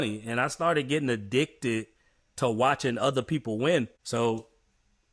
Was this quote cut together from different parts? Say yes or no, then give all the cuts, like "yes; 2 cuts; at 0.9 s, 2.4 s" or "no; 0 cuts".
yes; 1 cut; at 4.0 s